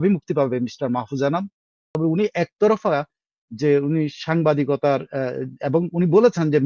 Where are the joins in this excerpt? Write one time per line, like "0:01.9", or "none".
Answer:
0:02.0

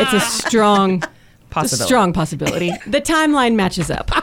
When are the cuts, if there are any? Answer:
0:02.7

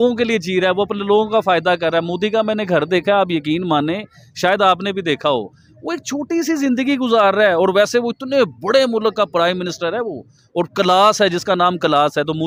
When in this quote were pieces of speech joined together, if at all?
none

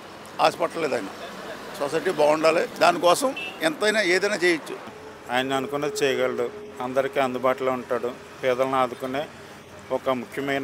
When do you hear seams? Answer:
0:02.7
0:03.5
0:04.9

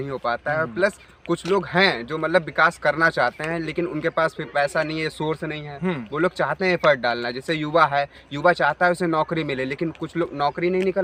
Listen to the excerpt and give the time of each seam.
none

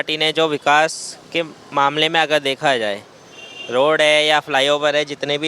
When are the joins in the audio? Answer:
none

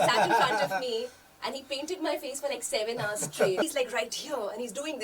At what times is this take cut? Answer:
0:03.6

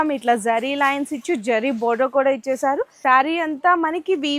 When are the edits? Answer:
0:02.9

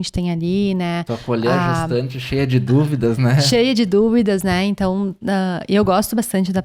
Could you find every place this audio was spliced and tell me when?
none

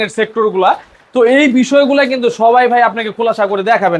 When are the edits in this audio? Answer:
none

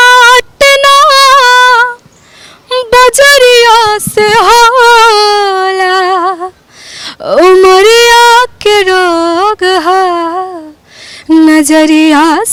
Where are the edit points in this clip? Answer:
none

